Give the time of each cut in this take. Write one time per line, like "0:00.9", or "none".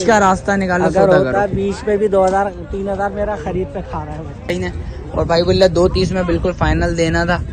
0:04.5